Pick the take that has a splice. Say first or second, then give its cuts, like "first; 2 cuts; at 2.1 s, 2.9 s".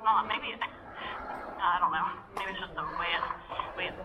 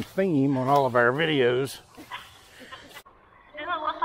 second; 1 cut; at 3.0 s